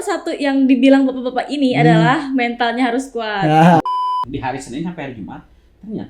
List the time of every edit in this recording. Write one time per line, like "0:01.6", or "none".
0:03.8

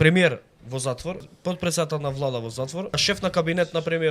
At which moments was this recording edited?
0:01.3
0:03.0

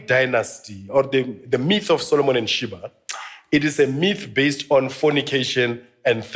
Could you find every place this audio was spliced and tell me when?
none

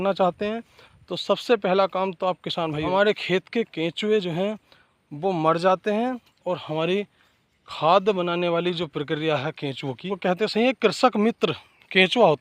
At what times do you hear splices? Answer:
0:02.9
0:10.0

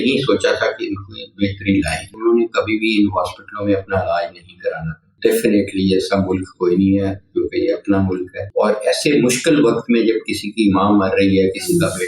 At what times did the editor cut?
0:02.0
0:05.1
0:08.4

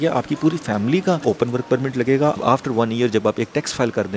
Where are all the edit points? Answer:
0:01.2
0:02.4

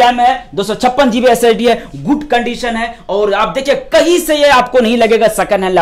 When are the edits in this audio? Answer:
none

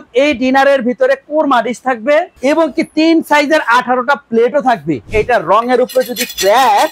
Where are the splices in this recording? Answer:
0:02.3
0:05.0

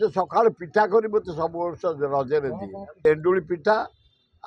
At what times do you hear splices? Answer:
0:03.0

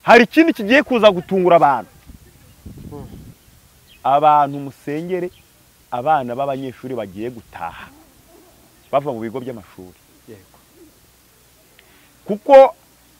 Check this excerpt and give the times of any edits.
0:03.3

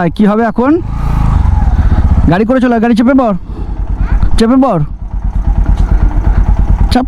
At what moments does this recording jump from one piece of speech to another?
none

